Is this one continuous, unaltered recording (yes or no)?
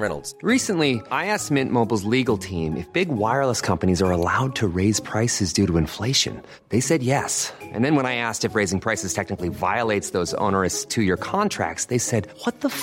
yes